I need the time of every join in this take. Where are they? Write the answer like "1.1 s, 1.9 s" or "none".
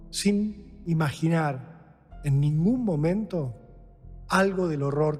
none